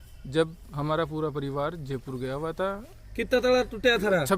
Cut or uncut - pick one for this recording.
cut